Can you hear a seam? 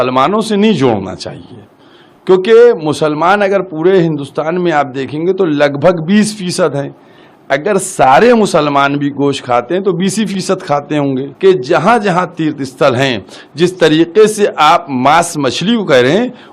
yes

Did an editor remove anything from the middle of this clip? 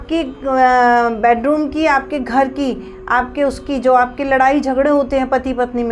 no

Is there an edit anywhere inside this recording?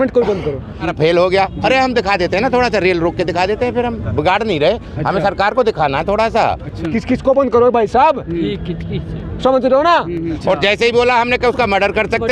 yes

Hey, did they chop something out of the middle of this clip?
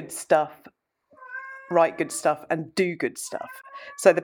no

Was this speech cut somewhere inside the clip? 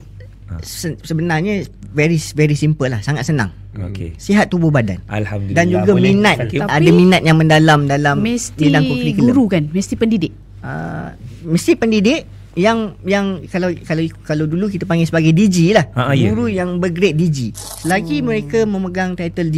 yes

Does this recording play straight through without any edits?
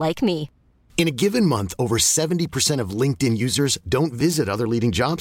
yes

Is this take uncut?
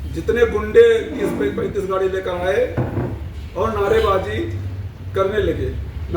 yes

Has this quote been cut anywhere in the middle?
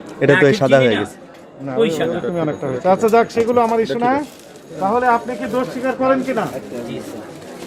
no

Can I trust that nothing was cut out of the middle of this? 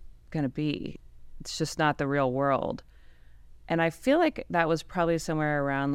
no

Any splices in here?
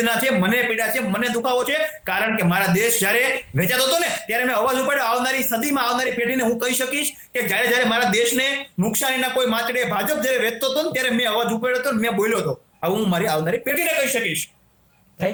no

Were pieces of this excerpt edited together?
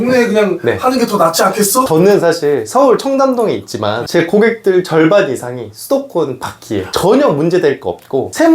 yes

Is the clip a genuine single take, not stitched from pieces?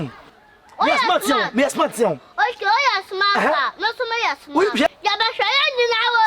no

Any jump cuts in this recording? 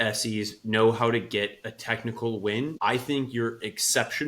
yes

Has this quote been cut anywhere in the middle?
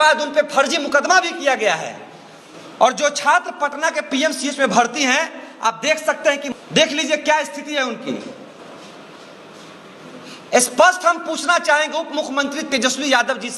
no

